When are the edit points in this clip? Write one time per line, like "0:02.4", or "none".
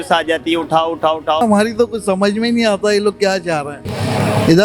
0:01.4